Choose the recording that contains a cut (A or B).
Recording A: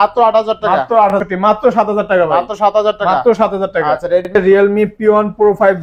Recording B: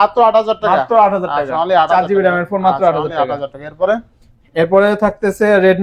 A